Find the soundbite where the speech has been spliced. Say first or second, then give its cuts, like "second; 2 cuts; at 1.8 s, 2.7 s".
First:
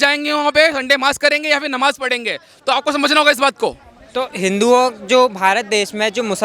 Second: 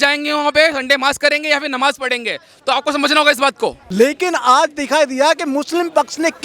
second; 1 cut; at 3.8 s